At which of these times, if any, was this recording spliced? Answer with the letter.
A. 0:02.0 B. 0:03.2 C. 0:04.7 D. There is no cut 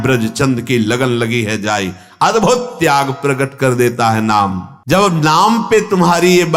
C